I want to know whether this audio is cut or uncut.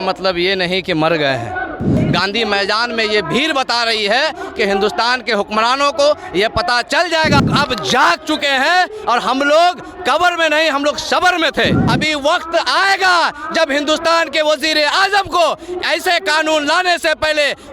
cut